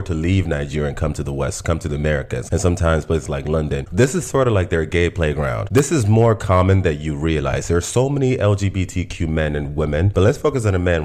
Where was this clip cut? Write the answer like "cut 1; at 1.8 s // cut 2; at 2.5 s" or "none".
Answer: cut 1; at 2.4 s